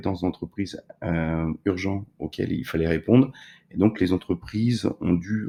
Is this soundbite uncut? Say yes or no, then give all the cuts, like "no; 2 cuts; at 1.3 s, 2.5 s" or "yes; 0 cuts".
yes; 0 cuts